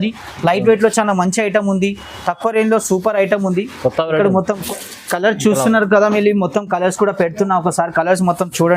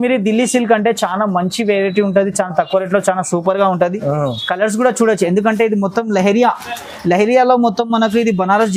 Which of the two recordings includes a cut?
first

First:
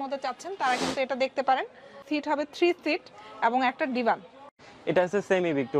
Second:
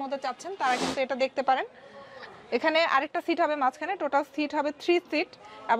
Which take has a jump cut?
first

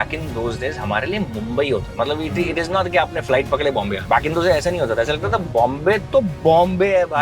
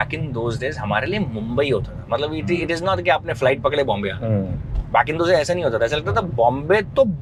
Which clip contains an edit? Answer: first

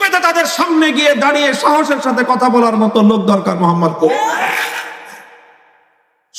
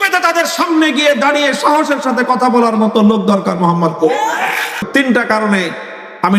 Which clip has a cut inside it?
second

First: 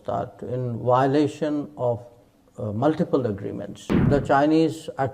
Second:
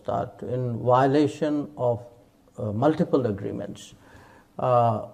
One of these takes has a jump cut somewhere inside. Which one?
first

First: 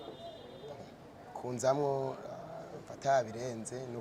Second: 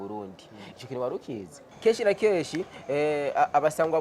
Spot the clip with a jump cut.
second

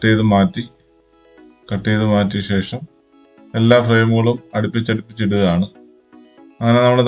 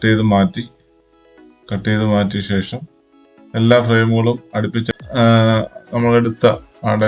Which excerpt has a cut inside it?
second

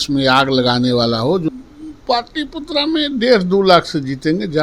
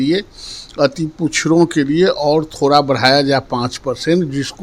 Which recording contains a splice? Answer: first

